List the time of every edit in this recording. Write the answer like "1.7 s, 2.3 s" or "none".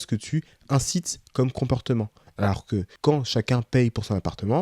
2.9 s